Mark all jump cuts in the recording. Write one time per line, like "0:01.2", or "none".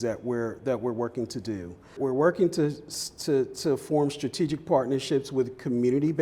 0:02.0